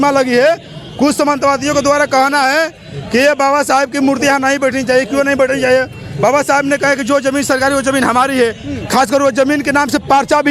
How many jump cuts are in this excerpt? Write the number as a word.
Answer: zero